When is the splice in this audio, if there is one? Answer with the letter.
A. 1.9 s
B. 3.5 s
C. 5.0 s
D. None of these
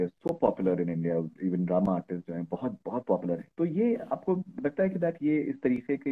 B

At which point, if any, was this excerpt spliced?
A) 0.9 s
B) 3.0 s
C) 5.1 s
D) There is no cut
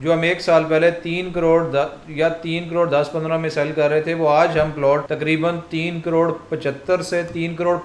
C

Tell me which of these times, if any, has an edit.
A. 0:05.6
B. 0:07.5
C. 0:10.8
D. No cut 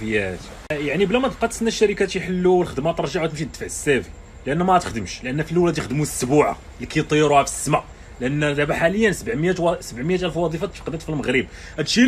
D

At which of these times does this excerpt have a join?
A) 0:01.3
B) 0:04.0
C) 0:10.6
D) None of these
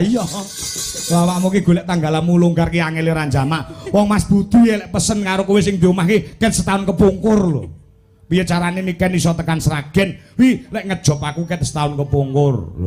D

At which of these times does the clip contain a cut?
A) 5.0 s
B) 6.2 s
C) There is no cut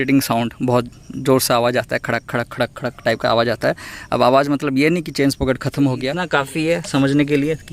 B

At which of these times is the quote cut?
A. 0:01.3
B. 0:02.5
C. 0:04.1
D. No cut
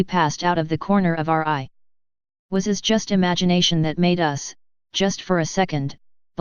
C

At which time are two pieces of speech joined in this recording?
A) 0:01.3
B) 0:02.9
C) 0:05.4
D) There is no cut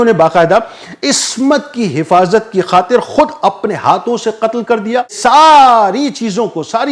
C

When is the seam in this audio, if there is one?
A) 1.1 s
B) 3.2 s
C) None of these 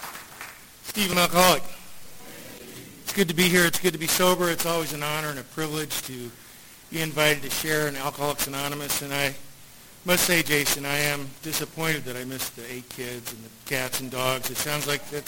A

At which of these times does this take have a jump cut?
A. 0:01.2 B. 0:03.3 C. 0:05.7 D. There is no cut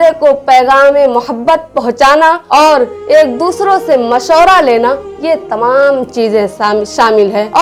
D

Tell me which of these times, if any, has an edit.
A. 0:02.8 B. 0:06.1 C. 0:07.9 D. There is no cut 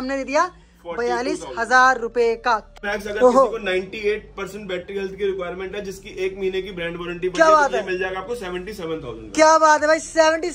A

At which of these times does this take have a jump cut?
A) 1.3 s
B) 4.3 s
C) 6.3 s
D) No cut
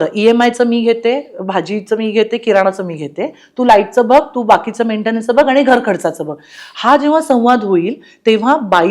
D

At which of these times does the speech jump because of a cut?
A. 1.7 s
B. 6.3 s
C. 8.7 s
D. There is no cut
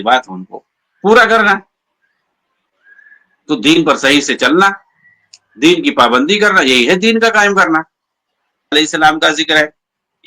C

